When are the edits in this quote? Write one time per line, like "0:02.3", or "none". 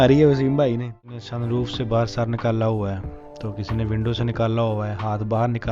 0:01.3